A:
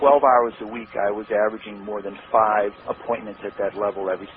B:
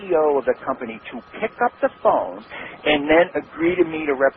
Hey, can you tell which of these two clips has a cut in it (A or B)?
B